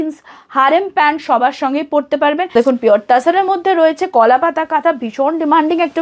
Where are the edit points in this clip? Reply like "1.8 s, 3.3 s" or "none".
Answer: 2.5 s